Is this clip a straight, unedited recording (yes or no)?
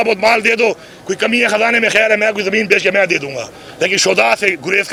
yes